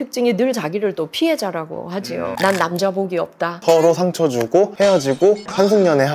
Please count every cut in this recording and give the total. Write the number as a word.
two